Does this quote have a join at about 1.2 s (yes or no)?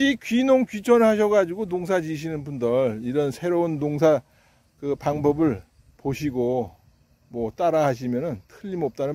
no